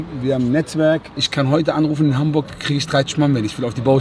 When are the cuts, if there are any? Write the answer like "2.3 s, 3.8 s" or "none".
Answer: 1.2 s